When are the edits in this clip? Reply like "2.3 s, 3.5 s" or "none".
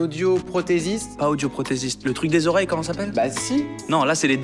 1.1 s